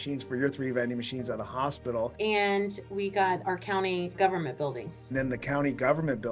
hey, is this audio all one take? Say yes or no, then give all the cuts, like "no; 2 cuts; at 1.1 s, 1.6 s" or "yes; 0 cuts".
no; 2 cuts; at 2.1 s, 5.1 s